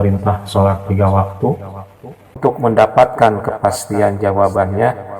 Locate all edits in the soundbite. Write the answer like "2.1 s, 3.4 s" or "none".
2.4 s